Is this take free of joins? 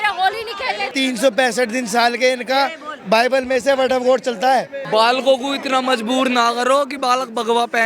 no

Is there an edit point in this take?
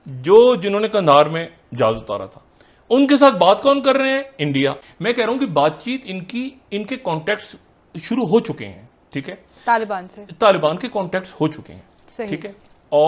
no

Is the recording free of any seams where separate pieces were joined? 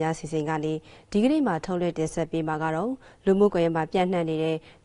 yes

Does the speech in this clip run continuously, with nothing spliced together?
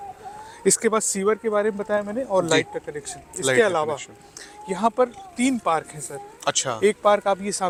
yes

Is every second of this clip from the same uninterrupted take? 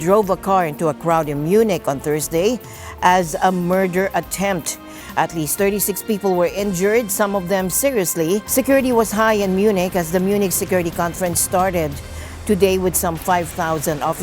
no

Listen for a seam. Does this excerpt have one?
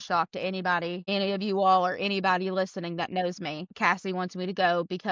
yes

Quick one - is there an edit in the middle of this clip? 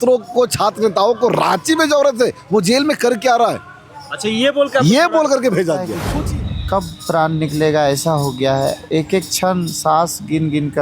yes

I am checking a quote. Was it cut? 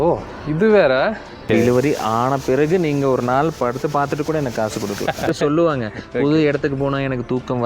yes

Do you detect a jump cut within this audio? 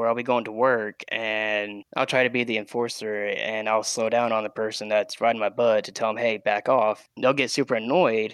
no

